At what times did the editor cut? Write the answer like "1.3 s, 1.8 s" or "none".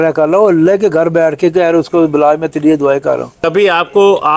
none